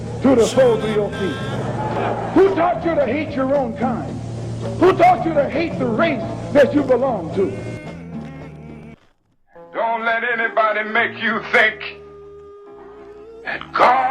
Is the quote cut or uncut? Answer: cut